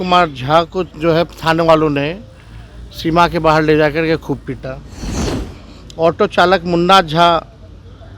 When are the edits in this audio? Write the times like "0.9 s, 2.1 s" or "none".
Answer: none